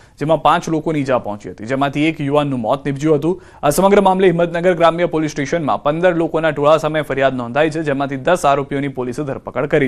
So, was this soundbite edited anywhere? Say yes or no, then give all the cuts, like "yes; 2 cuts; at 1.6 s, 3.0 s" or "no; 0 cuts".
no; 0 cuts